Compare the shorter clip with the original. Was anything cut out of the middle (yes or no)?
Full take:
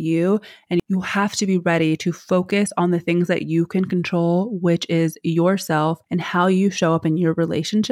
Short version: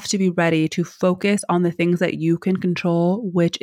no